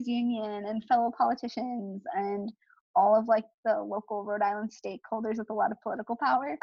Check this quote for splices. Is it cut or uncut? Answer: uncut